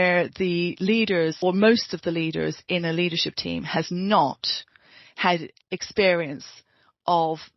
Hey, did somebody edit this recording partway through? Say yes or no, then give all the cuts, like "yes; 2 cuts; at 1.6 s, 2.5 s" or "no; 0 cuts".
yes; 1 cut; at 1.4 s